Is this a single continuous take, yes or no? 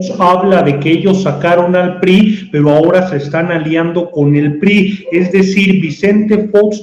yes